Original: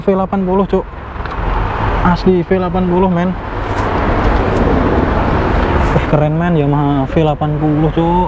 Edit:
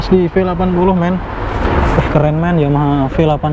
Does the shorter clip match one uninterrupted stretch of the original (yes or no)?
no